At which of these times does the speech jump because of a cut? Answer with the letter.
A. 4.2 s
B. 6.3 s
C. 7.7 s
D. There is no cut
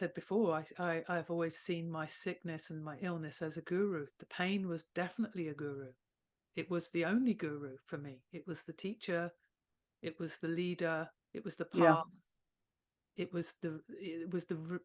D